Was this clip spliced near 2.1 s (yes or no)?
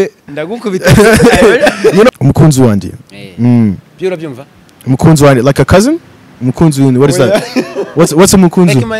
yes